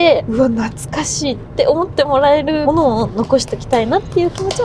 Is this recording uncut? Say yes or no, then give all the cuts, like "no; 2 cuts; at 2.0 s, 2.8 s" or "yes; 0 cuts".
yes; 0 cuts